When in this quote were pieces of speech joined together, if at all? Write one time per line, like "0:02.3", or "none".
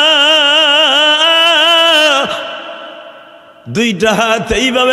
none

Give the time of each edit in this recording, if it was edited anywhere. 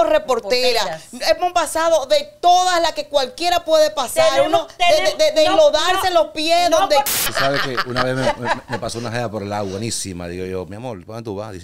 0:07.1

